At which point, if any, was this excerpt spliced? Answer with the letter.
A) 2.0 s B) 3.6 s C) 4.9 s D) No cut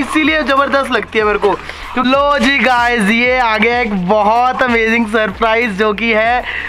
A